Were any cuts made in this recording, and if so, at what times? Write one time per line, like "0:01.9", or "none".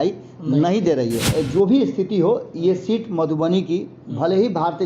0:01.2